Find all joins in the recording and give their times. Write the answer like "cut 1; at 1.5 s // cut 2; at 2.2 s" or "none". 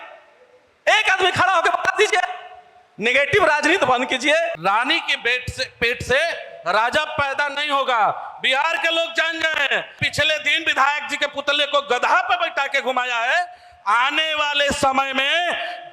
cut 1; at 4.6 s // cut 2; at 9.9 s